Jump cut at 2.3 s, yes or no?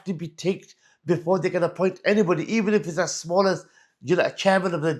no